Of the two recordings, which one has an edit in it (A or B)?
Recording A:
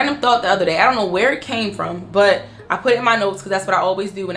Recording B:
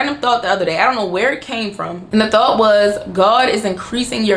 B